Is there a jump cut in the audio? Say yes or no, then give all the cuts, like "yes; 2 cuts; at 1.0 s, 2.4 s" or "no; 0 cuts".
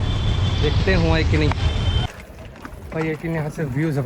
yes; 1 cut; at 2.0 s